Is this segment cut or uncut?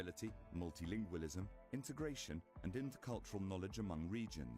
cut